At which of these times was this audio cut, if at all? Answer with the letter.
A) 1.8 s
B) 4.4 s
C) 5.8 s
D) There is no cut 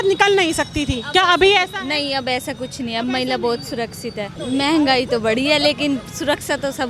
B